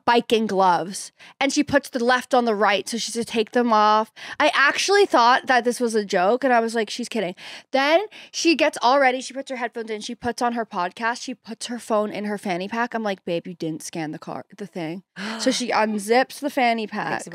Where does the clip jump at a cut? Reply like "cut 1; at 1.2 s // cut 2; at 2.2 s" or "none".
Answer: none